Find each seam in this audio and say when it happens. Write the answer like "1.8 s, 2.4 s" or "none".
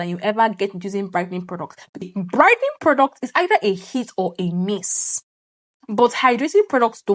2.0 s